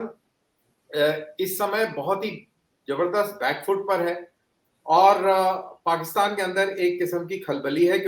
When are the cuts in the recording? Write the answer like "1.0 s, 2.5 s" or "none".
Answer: none